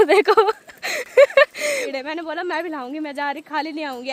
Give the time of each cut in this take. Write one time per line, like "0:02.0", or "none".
0:01.9